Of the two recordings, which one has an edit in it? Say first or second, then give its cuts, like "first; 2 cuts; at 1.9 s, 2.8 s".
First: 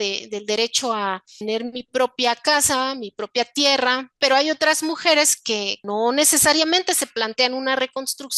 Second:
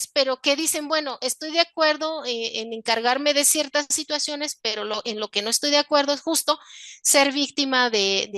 first; 3 cuts; at 1.4 s, 4.2 s, 5.8 s